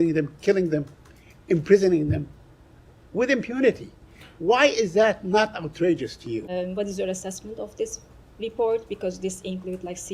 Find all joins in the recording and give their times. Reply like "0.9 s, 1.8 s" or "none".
6.5 s